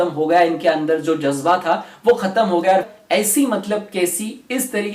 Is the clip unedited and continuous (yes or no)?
no